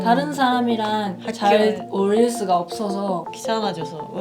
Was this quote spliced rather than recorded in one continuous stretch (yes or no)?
yes